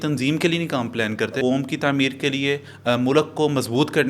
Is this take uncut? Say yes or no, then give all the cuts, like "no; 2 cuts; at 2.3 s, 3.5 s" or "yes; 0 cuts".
no; 1 cut; at 1.3 s